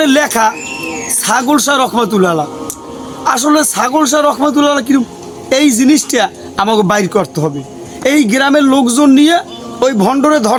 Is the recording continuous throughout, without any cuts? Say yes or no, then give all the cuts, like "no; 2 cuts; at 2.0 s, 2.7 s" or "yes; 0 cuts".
yes; 0 cuts